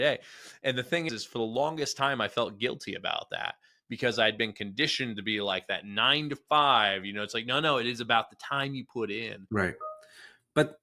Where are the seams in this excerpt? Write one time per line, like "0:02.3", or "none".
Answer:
0:01.1
0:09.3